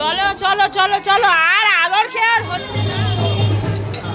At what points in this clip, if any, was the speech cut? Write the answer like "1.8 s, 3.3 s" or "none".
2.7 s